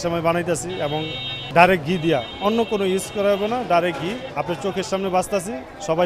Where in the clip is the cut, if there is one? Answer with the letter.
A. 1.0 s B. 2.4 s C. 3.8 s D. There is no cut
D